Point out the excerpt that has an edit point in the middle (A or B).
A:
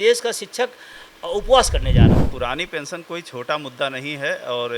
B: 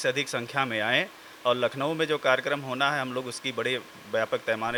A